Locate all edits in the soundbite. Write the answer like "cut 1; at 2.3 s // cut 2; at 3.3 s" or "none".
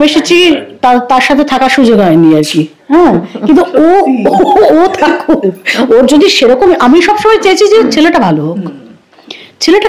none